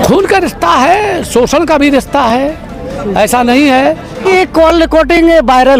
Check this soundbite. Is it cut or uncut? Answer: cut